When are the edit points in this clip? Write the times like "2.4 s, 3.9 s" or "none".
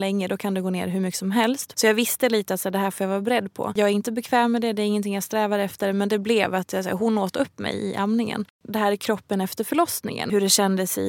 1.6 s, 3.7 s, 8.5 s, 10.3 s